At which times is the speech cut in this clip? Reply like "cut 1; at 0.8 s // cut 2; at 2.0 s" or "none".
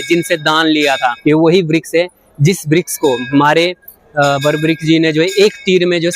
cut 1; at 1.2 s